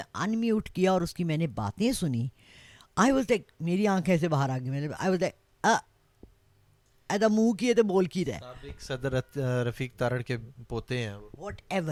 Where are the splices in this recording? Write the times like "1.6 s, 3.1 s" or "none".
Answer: none